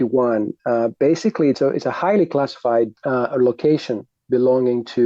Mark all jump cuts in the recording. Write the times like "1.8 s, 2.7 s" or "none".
1.6 s, 3.0 s